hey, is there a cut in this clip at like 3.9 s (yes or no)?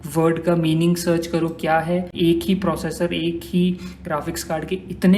no